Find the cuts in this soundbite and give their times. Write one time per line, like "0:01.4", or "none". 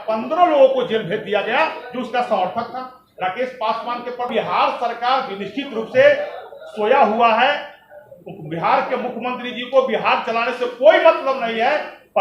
0:04.3